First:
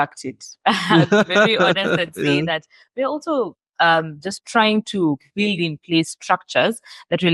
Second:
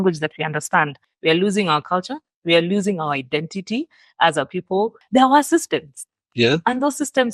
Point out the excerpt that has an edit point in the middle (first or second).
second